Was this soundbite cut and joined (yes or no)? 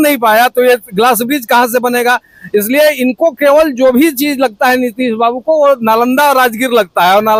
no